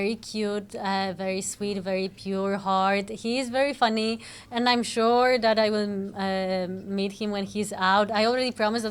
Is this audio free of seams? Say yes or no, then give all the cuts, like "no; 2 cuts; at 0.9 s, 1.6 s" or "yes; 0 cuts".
yes; 0 cuts